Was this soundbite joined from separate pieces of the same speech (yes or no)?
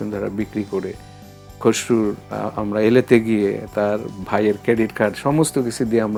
no